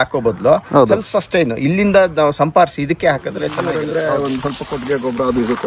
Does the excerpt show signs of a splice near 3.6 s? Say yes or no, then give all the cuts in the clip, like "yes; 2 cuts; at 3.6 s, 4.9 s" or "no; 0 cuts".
yes; 1 cut; at 3.6 s